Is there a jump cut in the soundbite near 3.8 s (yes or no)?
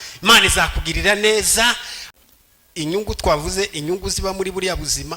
no